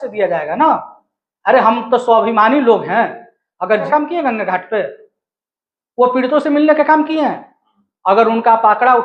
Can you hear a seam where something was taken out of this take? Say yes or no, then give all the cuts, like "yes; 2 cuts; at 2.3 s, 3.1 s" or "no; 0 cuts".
yes; 1 cut; at 3.9 s